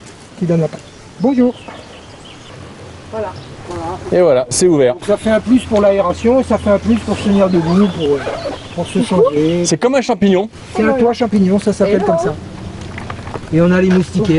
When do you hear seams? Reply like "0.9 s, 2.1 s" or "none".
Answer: none